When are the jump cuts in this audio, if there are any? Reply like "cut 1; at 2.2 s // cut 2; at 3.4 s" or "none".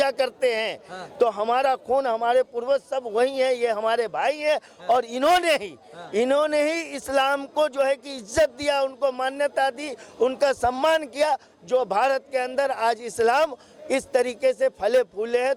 none